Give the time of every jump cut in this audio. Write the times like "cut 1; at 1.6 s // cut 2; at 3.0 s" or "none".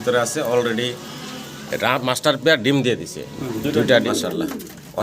cut 1; at 4.1 s

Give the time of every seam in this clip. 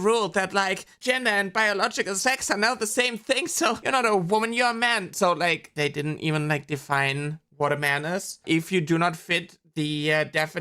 cut 1; at 0.9 s // cut 2; at 3.8 s // cut 3; at 5.7 s // cut 4; at 8.4 s

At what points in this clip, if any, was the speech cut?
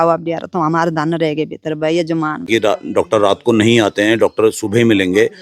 cut 1; at 2.5 s

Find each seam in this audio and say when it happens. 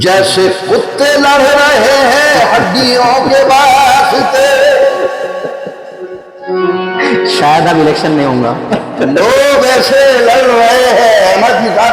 none

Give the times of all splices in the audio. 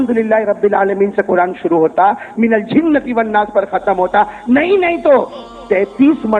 none

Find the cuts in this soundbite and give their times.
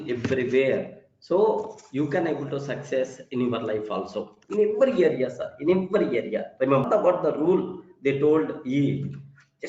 cut 1; at 6.9 s

